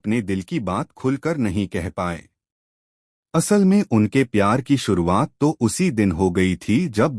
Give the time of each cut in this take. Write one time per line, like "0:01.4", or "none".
0:04.3